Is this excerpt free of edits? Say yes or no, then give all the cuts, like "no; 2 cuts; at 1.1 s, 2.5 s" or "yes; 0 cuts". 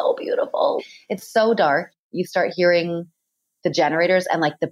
no; 1 cut; at 2.1 s